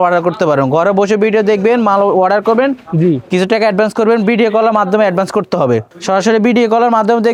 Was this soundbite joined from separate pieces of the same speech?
no; 0 cuts

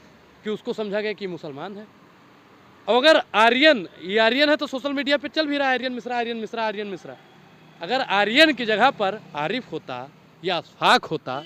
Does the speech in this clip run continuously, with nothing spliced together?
yes; 0 cuts

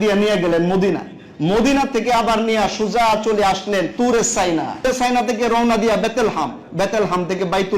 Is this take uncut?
no; 2 cuts; at 3.9 s, 4.8 s

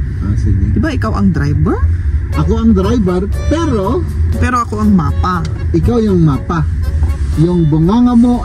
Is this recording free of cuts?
yes; 0 cuts

